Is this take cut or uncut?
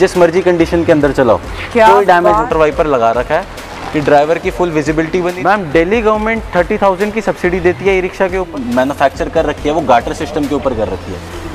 cut